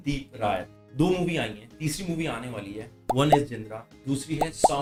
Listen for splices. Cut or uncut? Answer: uncut